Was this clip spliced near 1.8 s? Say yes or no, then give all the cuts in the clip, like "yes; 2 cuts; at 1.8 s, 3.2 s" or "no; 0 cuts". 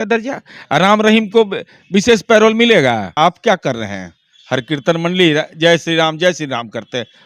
no; 1 cut; at 3.2 s